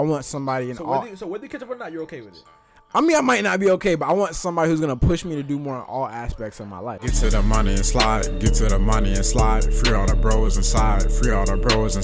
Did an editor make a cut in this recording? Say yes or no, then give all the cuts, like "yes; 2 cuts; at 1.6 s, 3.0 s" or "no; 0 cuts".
yes; 1 cut; at 7.0 s